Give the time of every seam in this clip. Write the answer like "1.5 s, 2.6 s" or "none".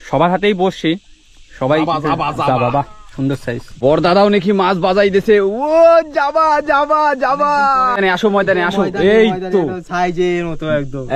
3.8 s, 8.0 s

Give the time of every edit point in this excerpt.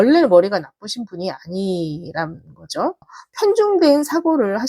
3.2 s

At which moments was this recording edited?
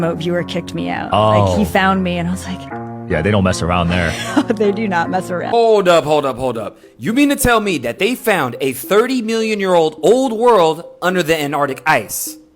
5.5 s

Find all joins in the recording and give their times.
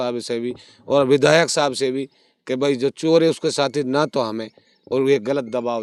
none

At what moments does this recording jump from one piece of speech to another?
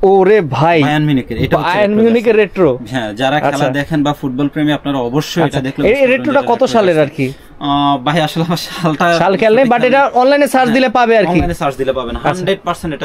none

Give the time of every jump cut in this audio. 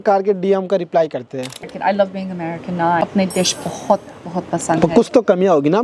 1.5 s, 3.0 s

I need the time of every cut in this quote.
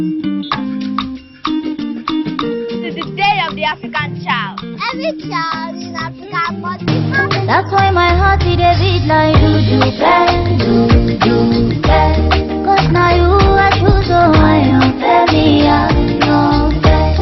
10.1 s

